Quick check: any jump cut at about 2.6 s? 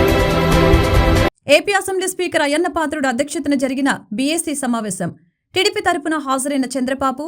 no; 1 cut; at 1.3 s

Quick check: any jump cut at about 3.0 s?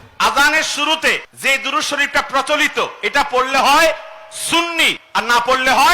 no; 2 cuts; at 1.3 s, 5.0 s

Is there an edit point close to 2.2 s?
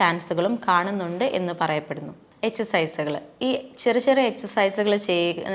yes; 1 cut; at 2.2 s

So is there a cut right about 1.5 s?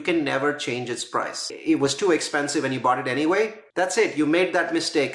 yes; 2 cuts; at 1.5 s, 3.6 s

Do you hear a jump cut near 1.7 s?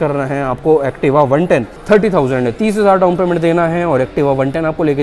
yes; 1 cut; at 1.7 s

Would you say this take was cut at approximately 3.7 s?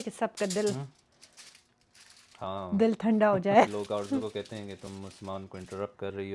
yes; 1 cut; at 3.7 s

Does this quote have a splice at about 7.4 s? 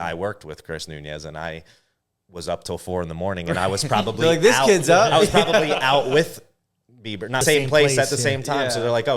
yes; 1 cut; at 7.4 s

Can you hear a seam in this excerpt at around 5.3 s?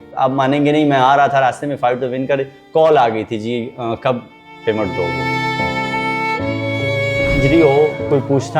no; 1 cut; at 7.3 s

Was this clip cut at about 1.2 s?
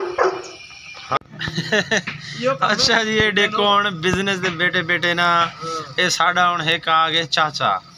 yes; 1 cut; at 1.2 s

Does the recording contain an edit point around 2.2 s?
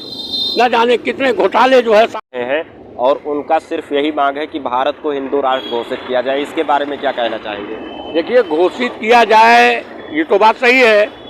yes; 1 cut; at 2.2 s

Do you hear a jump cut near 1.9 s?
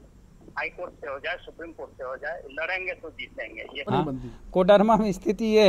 no; 1 cut; at 3.9 s

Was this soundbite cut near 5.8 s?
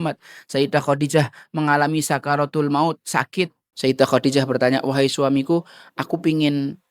no; 1 cut; at 3.6 s

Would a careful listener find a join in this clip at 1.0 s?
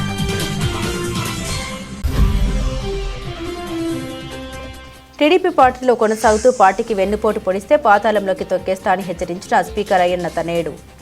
yes; 1 cut; at 1.0 s

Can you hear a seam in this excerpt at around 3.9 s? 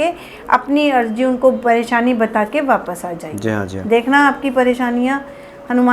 no; 0 cuts

